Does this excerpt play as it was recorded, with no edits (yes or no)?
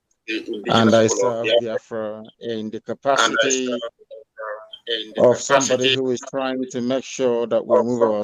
yes